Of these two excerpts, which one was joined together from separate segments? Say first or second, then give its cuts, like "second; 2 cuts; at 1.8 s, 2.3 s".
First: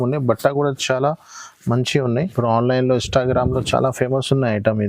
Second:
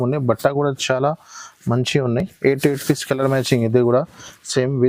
first; 1 cut; at 2.2 s